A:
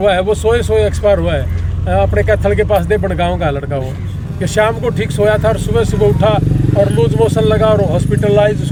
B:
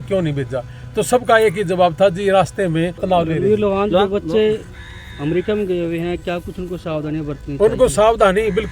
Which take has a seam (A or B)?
B